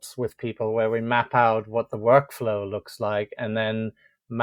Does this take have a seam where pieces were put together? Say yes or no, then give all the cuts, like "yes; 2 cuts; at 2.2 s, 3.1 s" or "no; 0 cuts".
no; 0 cuts